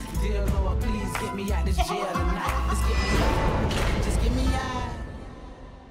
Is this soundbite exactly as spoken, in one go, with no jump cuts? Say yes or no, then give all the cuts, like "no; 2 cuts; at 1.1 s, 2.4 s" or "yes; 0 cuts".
yes; 0 cuts